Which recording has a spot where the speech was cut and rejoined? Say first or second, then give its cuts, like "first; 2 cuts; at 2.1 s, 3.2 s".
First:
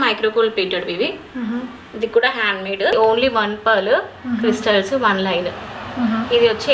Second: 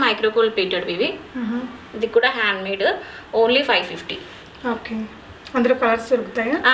first; 1 cut; at 2.9 s